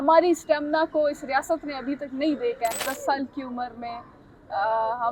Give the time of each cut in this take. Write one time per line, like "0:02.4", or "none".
0:02.7